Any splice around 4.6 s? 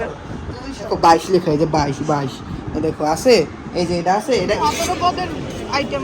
yes; 2 cuts; at 0.9 s, 4.6 s

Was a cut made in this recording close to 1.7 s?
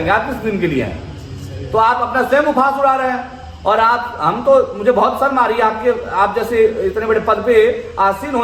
no; 0 cuts

